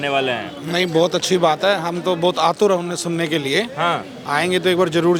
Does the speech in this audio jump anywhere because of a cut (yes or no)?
no